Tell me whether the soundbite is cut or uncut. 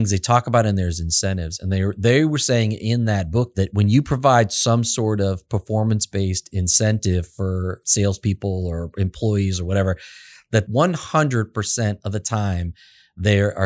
cut